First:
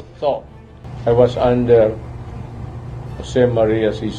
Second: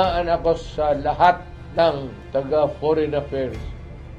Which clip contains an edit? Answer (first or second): second